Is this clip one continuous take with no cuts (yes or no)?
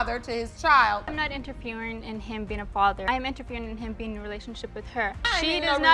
no